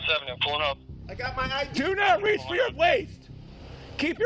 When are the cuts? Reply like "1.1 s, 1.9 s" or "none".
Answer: none